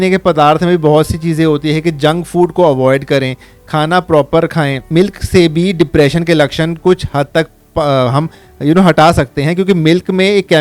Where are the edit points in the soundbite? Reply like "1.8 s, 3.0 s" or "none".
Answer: 4.8 s